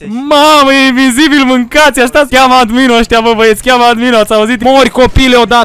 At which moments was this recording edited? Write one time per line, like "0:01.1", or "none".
0:02.3
0:04.6